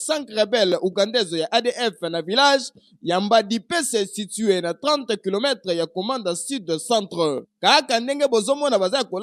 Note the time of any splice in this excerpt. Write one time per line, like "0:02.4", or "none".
none

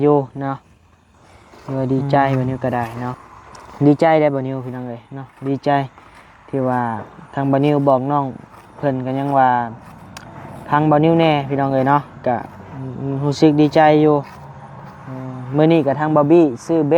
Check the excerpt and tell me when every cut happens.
0:03.1

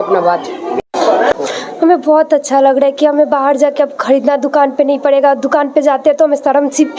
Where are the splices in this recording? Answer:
0:01.3

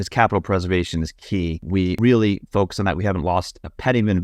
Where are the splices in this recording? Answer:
0:01.8

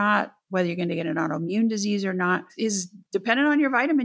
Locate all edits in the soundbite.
0:02.5

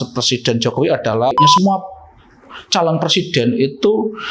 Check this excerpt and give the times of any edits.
0:01.3

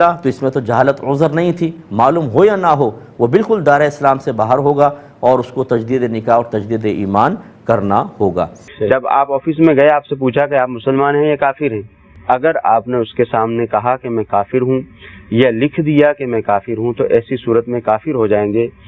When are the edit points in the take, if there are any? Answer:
0:08.6

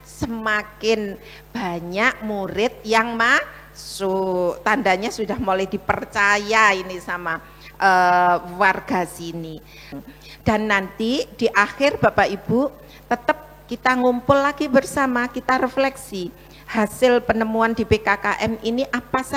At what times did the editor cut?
none

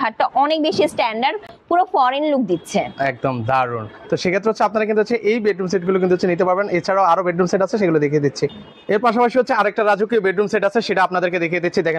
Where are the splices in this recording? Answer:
none

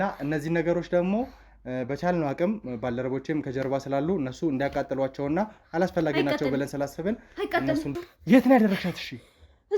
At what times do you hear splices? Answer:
0:07.9

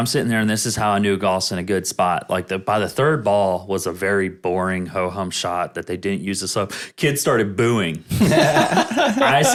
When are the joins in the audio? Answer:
none

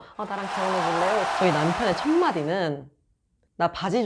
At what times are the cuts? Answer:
0:01.3

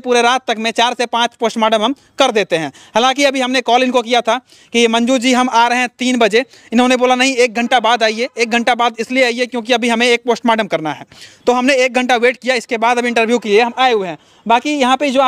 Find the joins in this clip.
none

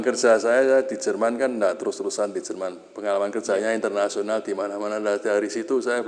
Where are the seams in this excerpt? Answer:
none

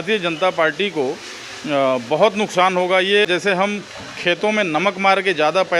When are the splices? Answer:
0:03.2

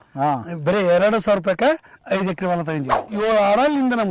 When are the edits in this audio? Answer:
0:02.0
0:03.1

